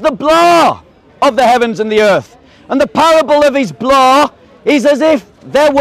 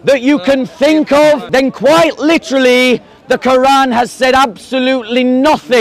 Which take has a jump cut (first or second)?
second